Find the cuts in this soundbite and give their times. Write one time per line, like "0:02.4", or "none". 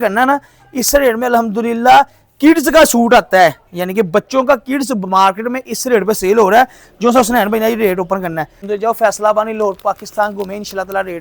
0:08.6